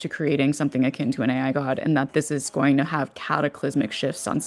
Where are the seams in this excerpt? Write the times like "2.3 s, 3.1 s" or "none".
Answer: none